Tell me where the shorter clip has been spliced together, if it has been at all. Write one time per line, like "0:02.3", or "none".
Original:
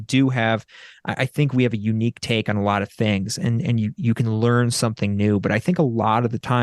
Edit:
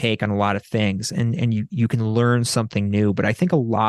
none